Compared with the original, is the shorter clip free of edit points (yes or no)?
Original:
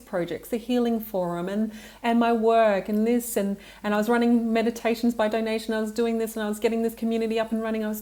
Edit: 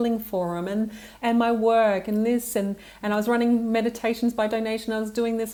yes